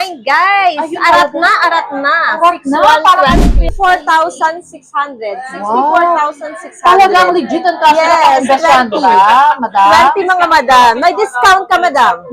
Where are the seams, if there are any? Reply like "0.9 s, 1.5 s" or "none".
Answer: 3.7 s

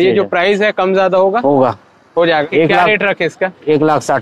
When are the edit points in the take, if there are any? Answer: 2.4 s

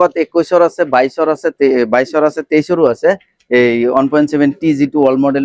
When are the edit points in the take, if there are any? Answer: none

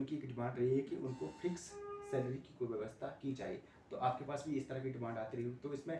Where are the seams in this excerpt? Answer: none

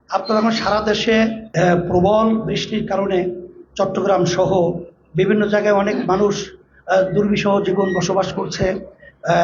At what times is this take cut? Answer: 1.4 s

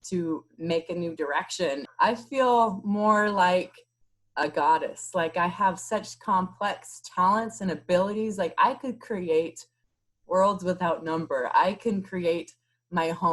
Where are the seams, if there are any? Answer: 1.8 s

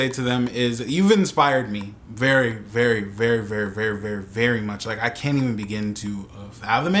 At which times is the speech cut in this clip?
none

